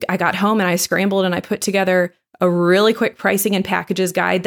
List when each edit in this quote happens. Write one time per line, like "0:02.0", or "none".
none